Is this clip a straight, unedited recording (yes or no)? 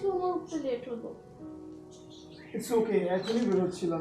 no